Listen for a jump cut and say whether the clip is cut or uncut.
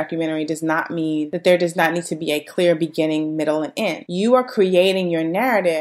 uncut